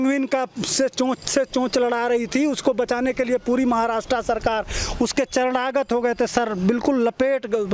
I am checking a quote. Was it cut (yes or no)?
no